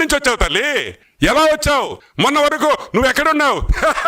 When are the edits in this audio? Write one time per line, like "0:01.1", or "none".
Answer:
0:01.0
0:02.0